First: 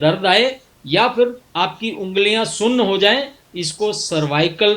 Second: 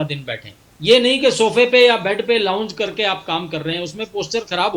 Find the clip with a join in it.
first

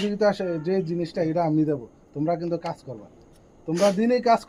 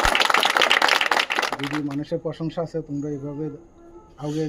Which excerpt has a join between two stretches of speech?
second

